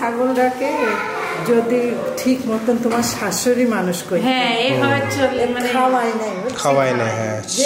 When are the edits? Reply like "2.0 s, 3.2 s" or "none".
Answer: none